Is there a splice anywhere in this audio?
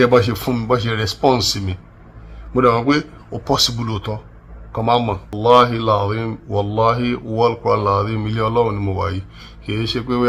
yes; 1 cut; at 5.3 s

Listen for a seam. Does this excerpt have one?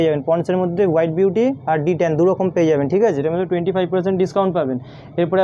no; 0 cuts

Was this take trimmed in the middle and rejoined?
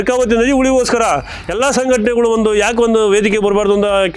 no; 0 cuts

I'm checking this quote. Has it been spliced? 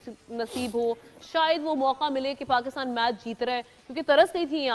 no; 0 cuts

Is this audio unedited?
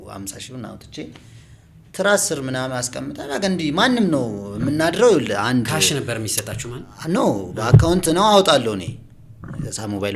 yes; 0 cuts

